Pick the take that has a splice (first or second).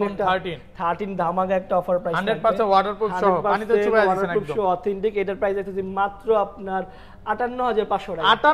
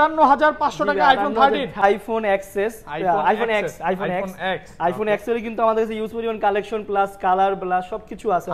second